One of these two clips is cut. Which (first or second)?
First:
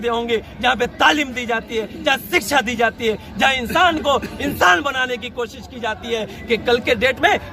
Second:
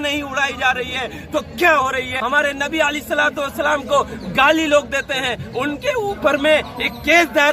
second